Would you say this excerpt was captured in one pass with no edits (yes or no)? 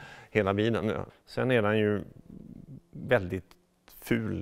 no